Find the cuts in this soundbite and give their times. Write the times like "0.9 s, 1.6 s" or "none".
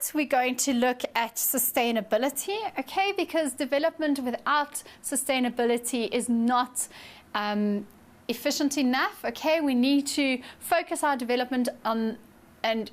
5.6 s